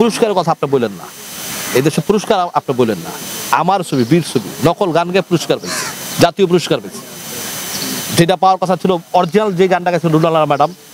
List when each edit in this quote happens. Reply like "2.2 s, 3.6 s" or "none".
none